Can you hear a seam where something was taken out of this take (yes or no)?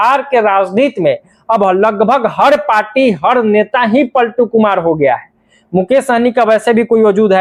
no